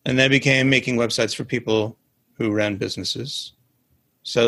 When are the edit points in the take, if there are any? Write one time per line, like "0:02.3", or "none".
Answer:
none